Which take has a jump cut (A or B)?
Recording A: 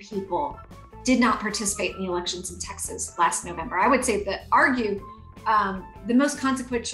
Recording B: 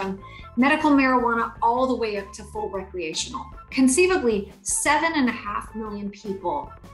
B